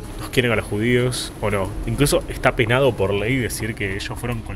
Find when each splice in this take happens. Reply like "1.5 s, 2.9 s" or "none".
none